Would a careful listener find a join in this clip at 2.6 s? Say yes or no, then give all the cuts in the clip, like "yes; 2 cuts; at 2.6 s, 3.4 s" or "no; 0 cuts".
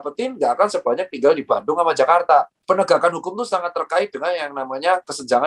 yes; 1 cut; at 2.6 s